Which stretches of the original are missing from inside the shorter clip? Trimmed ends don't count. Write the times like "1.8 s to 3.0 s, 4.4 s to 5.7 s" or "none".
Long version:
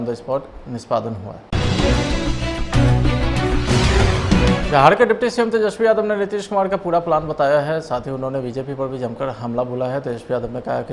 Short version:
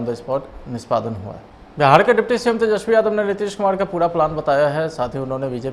1.7 s to 4.6 s